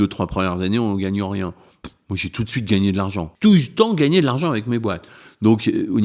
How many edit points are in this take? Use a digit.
1